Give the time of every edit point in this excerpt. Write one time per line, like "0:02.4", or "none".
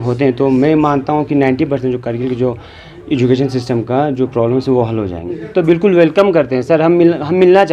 0:05.4